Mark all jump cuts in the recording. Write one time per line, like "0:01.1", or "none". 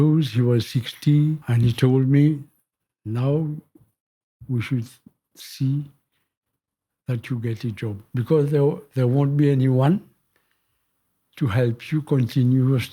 0:01.5
0:08.0